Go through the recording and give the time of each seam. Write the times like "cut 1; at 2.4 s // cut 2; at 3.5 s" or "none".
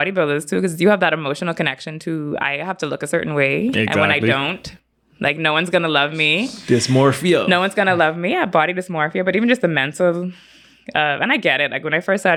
none